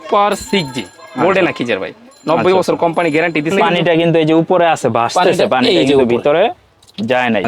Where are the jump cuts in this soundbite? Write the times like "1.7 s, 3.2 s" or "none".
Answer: 3.6 s